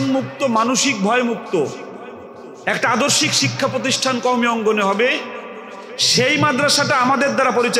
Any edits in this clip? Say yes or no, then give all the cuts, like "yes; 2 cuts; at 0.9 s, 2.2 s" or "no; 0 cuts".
no; 0 cuts